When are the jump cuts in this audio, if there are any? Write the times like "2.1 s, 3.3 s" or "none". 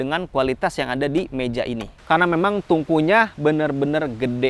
1.8 s